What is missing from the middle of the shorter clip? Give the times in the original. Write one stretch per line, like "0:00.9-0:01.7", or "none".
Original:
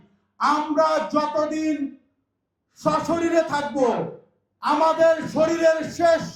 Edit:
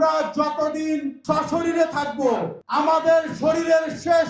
0:01.9-0:02.7
0:04.4-0:04.8